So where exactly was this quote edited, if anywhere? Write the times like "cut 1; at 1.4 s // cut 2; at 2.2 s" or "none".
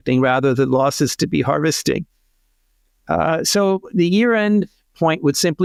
none